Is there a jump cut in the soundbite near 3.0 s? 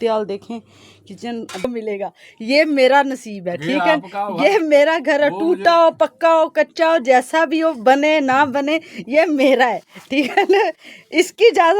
no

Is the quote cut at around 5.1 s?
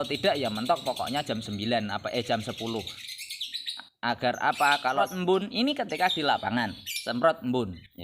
yes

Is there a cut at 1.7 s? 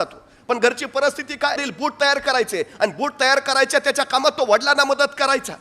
yes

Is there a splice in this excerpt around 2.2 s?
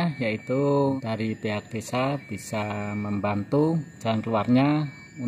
no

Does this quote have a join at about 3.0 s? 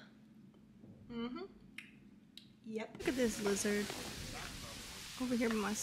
yes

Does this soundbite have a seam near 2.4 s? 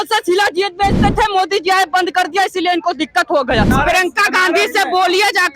no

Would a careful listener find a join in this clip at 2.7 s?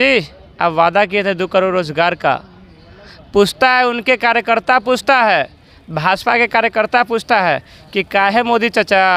no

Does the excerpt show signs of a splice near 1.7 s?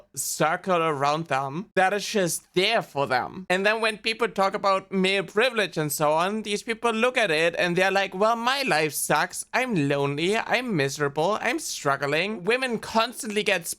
no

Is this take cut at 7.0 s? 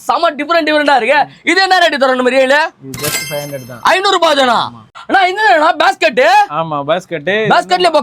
no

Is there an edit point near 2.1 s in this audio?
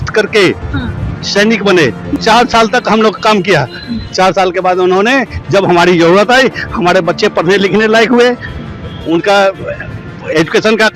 yes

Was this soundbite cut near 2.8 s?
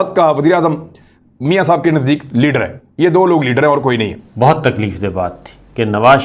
no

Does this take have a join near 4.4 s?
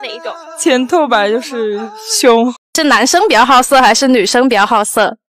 no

